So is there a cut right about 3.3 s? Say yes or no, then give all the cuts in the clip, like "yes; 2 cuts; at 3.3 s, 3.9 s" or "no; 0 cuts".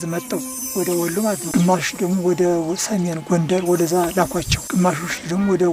no; 2 cuts; at 1.4 s, 4.6 s